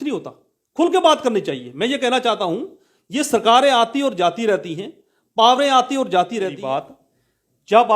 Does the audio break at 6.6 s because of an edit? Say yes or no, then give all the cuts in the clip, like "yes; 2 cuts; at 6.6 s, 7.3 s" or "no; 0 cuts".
yes; 1 cut; at 6.6 s